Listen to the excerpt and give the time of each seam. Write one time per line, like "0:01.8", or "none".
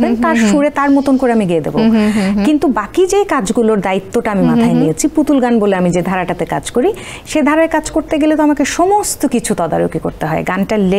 none